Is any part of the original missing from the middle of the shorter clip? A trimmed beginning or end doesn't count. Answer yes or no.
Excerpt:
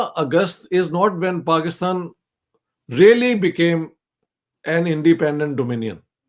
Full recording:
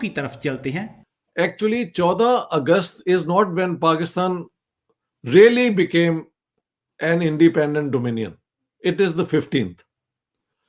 no